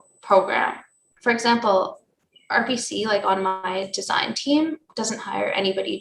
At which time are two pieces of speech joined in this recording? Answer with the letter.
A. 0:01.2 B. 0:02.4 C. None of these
A